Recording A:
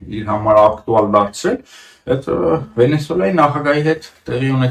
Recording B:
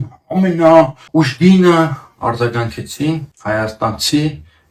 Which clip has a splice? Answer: B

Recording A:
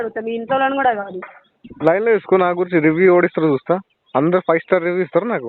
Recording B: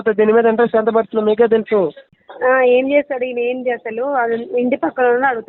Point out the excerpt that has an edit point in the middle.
B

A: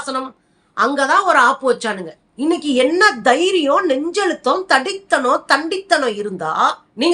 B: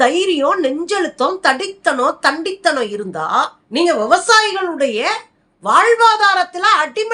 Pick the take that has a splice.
A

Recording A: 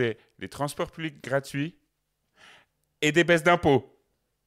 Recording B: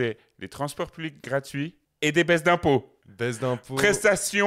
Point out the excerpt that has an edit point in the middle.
B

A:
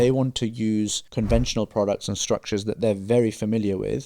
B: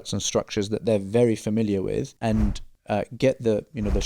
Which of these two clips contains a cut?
A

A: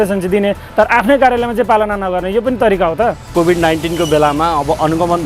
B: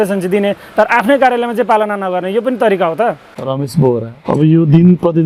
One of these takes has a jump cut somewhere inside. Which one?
A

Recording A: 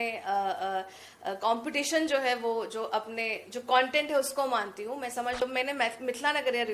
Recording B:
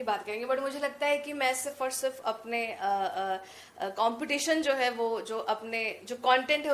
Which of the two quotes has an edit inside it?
A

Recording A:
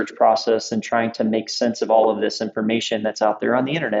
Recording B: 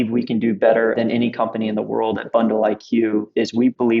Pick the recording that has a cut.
B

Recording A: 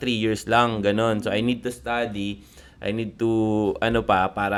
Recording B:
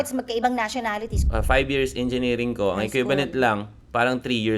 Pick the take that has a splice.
B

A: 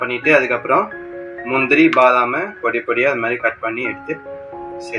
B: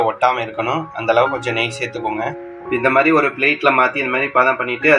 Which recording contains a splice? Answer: B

